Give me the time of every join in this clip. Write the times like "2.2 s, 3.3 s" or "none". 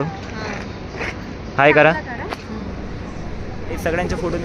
none